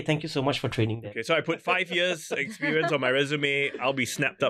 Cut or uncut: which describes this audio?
uncut